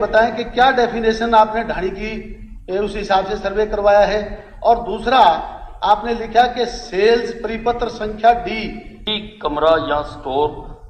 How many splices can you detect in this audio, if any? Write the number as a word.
one